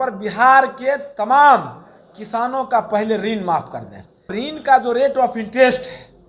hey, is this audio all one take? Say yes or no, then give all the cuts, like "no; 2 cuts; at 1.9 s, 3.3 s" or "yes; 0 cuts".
no; 1 cut; at 4.4 s